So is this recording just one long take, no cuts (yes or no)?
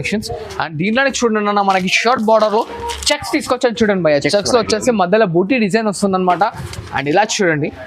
yes